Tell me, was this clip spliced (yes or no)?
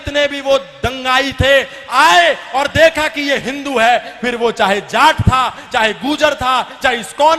no